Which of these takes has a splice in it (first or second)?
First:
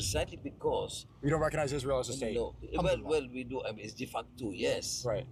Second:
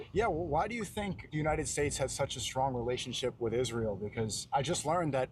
second